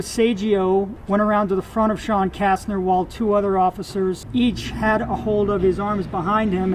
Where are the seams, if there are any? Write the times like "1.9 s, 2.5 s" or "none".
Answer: 1.0 s, 4.2 s